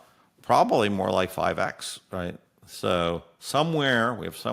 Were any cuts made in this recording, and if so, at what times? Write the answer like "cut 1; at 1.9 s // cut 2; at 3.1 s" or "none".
none